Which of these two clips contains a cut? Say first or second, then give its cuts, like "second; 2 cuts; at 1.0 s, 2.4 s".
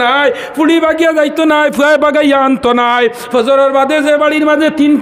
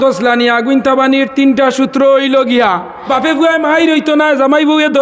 second; 1 cut; at 3.0 s